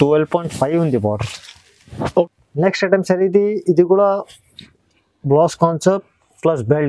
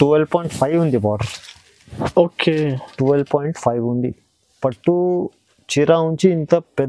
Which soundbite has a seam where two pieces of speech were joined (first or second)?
first